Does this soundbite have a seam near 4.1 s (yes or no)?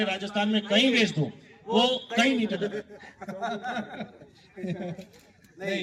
no